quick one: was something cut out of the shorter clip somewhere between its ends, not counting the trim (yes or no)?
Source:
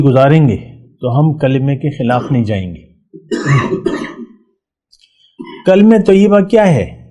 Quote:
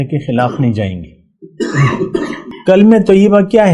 yes